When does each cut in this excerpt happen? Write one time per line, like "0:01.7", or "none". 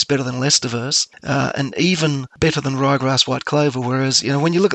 none